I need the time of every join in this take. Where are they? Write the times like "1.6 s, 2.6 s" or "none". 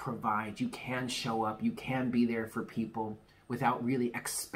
none